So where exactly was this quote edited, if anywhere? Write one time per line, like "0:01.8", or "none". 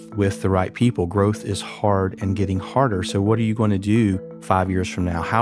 0:04.3